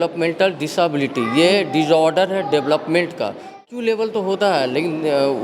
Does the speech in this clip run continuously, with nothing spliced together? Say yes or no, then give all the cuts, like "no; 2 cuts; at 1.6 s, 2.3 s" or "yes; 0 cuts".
no; 1 cut; at 3.6 s